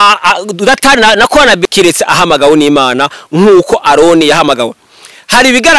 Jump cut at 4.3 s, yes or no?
no